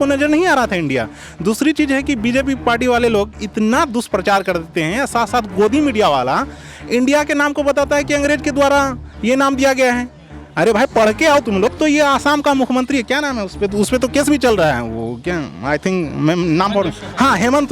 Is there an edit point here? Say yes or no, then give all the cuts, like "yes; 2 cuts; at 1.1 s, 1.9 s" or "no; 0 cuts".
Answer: yes; 1 cut; at 11.7 s